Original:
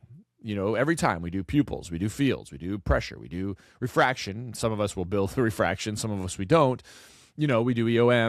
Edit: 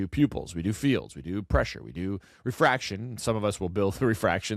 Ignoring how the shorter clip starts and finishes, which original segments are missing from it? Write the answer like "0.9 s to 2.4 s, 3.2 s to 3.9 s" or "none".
none